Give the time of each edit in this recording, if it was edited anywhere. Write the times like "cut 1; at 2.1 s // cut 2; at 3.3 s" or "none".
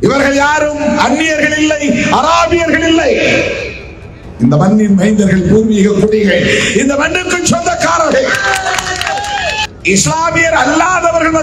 cut 1; at 9.7 s